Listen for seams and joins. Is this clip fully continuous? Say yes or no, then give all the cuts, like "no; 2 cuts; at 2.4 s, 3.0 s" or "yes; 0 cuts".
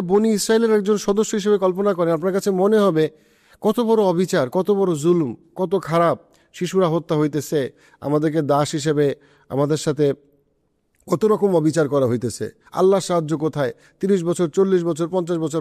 yes; 0 cuts